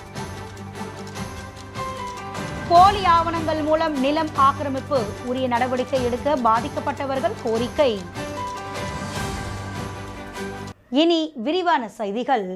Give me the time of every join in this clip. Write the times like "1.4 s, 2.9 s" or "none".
10.8 s